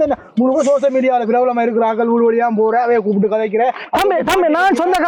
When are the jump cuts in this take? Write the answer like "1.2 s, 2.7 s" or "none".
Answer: none